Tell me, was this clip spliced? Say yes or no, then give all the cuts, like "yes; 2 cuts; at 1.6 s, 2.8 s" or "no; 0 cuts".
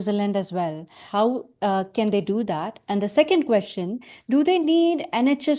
yes; 1 cut; at 1.0 s